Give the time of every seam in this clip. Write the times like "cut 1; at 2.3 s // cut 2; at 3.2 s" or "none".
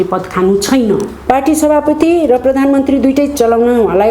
cut 1; at 1.2 s